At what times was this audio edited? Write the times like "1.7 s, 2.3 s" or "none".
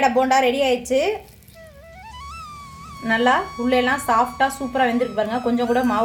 none